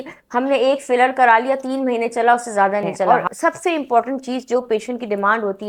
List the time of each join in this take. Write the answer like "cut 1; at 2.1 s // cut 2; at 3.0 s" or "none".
cut 1; at 3.1 s